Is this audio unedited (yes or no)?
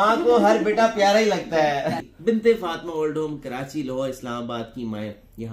no